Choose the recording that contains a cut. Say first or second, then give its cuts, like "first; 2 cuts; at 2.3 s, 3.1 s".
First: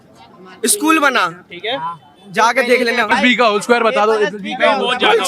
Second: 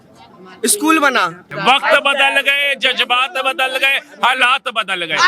second; 1 cut; at 1.5 s